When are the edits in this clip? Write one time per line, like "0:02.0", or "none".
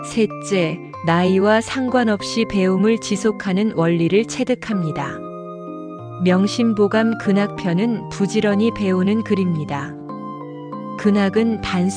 none